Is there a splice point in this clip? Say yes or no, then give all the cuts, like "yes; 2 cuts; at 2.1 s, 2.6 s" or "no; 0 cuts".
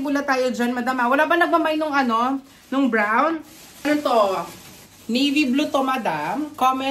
yes; 1 cut; at 3.8 s